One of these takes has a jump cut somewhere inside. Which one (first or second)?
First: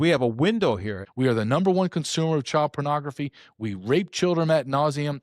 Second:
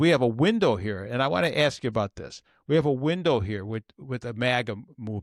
first